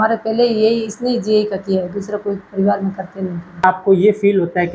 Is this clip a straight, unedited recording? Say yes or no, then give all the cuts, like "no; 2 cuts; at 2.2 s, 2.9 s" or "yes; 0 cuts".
no; 1 cut; at 3.6 s